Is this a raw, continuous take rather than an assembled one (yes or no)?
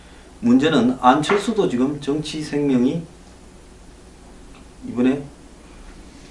no